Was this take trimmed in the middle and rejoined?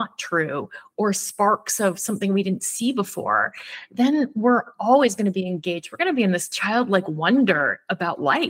no; 0 cuts

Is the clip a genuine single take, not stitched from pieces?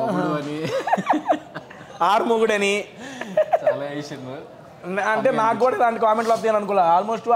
yes; 0 cuts

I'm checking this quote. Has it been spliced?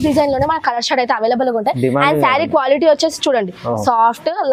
no; 0 cuts

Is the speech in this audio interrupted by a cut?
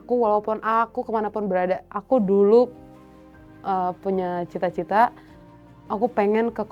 yes; 1 cut; at 1.9 s

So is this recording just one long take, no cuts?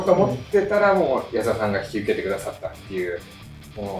yes; 0 cuts

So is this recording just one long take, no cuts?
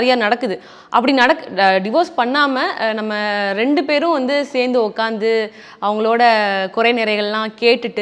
yes; 0 cuts

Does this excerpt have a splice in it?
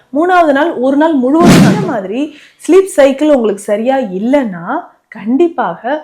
yes; 1 cut; at 1.8 s

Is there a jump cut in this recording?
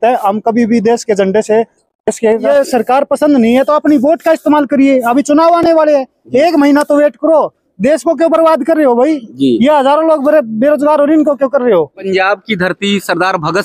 yes; 2 cuts; at 2.4 s, 12.1 s

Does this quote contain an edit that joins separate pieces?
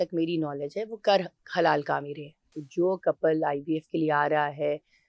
yes; 1 cut; at 2.5 s

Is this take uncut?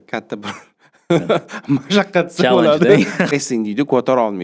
no; 1 cut; at 3.3 s

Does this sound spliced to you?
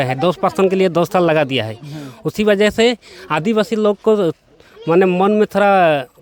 no; 0 cuts

